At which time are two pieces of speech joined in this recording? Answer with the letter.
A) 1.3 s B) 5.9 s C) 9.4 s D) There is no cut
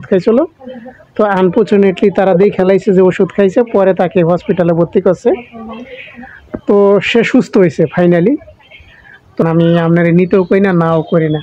C